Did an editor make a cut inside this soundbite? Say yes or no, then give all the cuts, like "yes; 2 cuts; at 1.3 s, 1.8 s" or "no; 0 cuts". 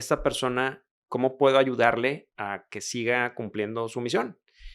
yes; 2 cuts; at 0.9 s, 2.3 s